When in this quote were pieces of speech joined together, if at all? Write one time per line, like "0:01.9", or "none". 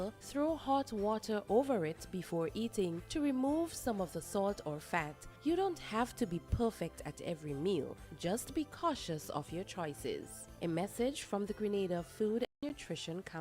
0:12.5